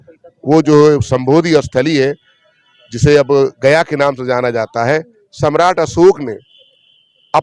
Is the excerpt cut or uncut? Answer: uncut